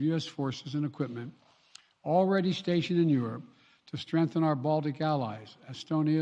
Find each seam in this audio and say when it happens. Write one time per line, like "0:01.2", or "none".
none